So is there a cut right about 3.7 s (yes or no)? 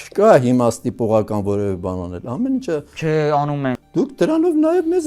yes